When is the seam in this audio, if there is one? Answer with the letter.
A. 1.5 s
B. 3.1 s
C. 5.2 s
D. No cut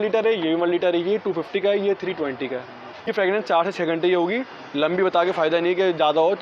B